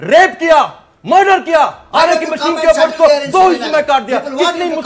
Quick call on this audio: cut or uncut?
uncut